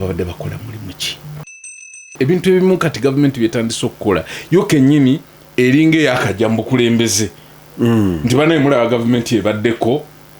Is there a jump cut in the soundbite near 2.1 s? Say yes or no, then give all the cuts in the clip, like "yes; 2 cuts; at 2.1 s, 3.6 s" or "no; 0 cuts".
yes; 1 cut; at 2.1 s